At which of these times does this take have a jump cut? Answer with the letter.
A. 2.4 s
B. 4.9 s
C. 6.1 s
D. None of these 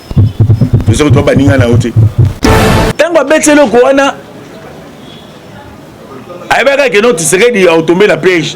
A